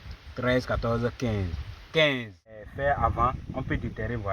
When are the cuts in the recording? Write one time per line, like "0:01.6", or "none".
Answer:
0:02.7